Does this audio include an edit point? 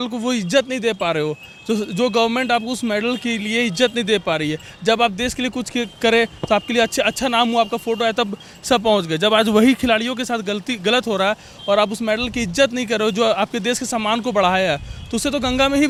no; 0 cuts

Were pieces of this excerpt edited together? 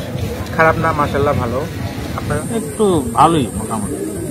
yes; 1 cut; at 2.4 s

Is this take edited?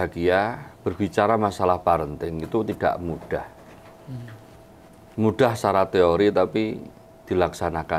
no; 0 cuts

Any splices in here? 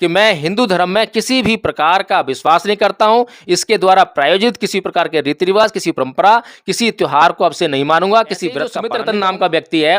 yes; 1 cut; at 8.8 s

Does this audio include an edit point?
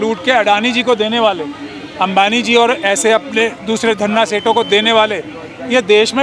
no; 0 cuts

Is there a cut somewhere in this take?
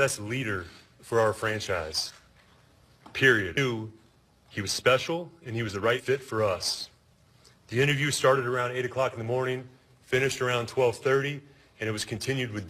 no; 0 cuts

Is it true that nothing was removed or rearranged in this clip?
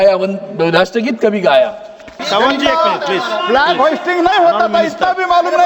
no; 1 cut; at 2.2 s

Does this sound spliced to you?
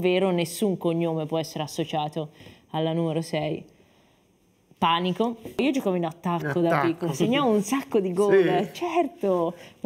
yes; 1 cut; at 5.6 s

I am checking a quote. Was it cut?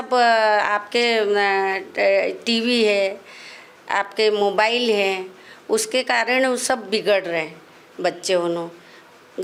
no; 0 cuts

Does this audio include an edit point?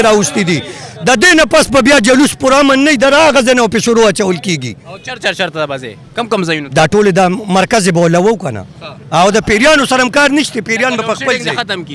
no; 0 cuts

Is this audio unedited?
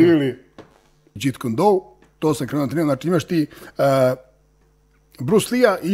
no; 1 cut; at 1.1 s

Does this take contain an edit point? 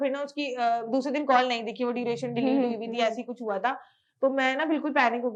no; 0 cuts

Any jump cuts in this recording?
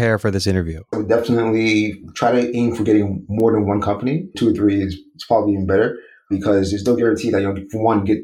yes; 2 cuts; at 1.0 s, 4.3 s

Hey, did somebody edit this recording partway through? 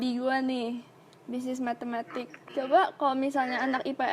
yes; 1 cut; at 2.0 s

